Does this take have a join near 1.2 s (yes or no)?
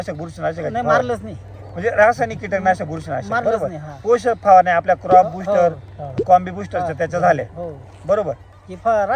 no